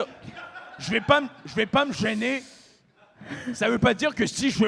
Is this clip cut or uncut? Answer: uncut